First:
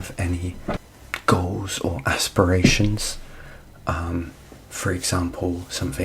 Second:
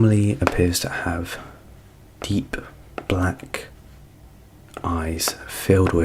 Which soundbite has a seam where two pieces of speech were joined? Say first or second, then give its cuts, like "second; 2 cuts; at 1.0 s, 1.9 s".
first; 1 cut; at 0.9 s